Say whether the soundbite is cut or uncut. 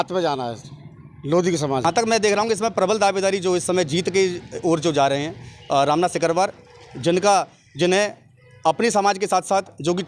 cut